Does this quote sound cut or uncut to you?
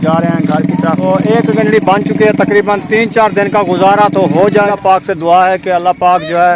cut